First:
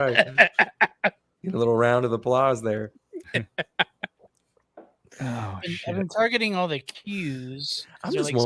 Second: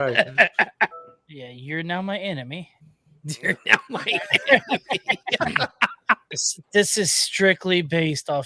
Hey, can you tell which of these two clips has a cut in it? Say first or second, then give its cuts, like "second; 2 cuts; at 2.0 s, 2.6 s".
second; 2 cuts; at 1.0 s, 6.5 s